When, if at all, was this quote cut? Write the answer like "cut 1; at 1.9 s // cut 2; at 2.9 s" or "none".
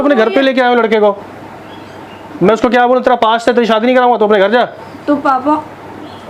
none